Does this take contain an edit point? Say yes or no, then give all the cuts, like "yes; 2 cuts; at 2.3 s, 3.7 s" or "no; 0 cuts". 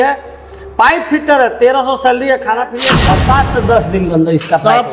yes; 1 cut; at 2.8 s